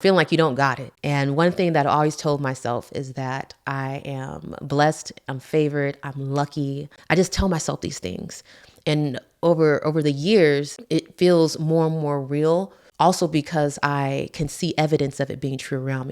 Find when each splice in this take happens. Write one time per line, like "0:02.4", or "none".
0:06.9
0:10.7